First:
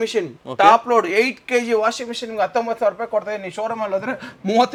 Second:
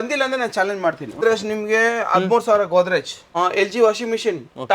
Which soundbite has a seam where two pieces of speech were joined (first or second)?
second